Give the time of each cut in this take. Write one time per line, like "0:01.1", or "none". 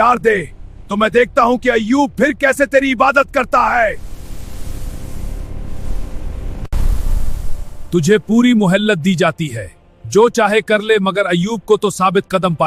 none